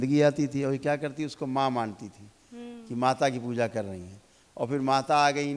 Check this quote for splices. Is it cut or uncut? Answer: uncut